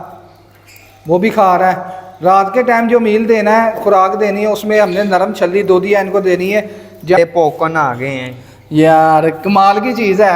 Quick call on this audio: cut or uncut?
cut